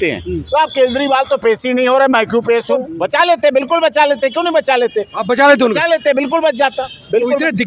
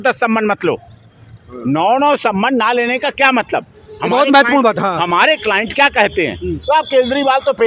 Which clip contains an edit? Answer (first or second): first